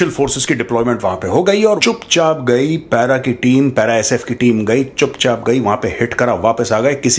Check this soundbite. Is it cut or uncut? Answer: cut